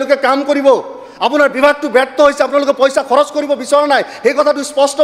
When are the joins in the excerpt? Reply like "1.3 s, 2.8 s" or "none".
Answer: none